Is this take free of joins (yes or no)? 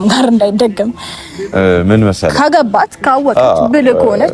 yes